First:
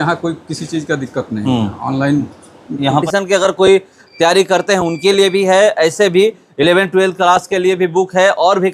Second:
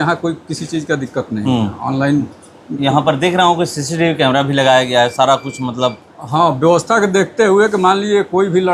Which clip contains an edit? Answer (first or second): first